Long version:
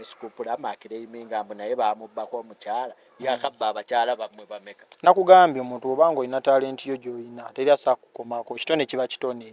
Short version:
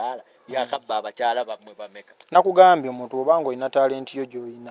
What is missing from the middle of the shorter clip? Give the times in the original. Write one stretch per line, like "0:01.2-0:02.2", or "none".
none

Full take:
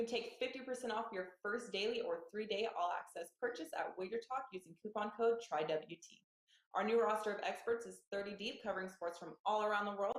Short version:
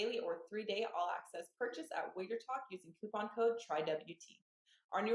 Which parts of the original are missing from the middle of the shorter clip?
none

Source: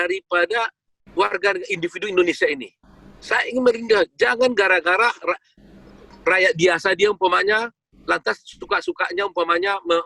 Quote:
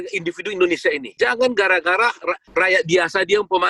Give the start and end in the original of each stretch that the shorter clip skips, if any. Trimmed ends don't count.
0:02.7-0:04.1
0:05.4-0:06.1

